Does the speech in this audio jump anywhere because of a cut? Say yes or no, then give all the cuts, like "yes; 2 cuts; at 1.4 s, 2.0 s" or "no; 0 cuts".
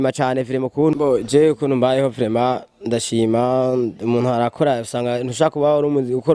yes; 1 cut; at 0.9 s